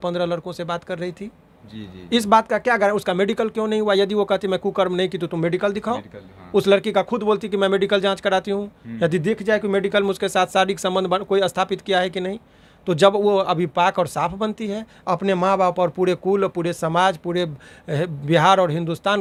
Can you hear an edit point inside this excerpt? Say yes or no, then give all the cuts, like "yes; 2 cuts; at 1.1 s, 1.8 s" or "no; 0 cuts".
no; 0 cuts